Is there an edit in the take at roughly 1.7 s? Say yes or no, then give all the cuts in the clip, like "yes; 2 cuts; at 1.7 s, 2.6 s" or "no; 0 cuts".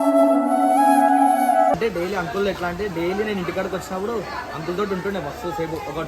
yes; 1 cut; at 1.7 s